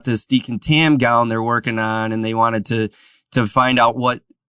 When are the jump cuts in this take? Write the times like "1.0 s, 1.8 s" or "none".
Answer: none